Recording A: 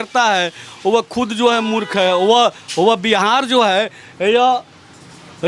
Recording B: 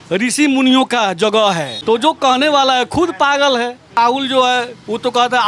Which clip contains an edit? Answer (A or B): B